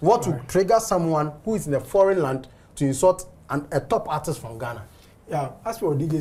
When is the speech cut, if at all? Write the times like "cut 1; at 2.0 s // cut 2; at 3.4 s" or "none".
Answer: none

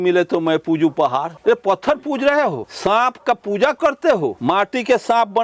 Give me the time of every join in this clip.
cut 1; at 1.3 s // cut 2; at 2.7 s // cut 3; at 4.4 s

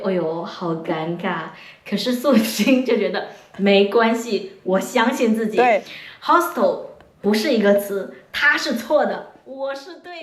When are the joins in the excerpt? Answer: none

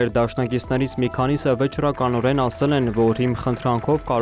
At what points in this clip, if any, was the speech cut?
none

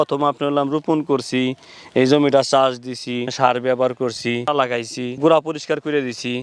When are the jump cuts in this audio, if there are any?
cut 1; at 3.3 s // cut 2; at 4.9 s

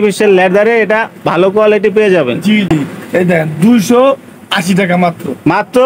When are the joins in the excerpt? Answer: cut 1; at 2.7 s

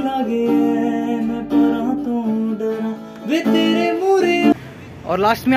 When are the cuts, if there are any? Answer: cut 1; at 4.5 s

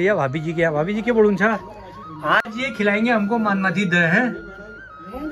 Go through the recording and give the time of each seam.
none

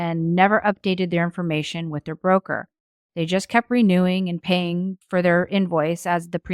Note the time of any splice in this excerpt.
cut 1; at 5.0 s

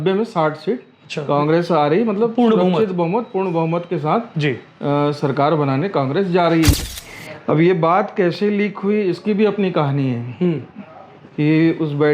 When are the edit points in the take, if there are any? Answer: cut 1; at 6.7 s

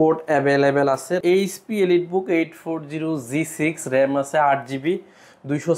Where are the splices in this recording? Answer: cut 1; at 1.2 s

